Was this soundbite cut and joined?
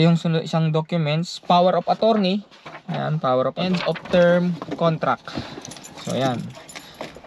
yes; 1 cut; at 3.7 s

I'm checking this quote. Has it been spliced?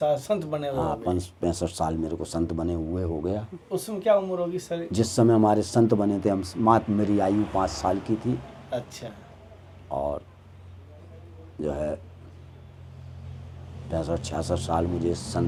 no; 0 cuts

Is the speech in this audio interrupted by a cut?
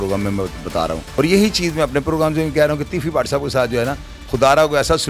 yes; 1 cut; at 1.0 s

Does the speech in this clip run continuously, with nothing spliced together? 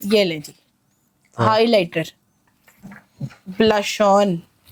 yes; 0 cuts

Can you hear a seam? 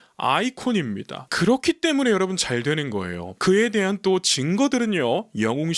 no; 0 cuts

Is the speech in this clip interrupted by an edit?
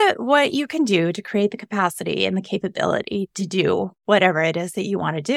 no; 0 cuts

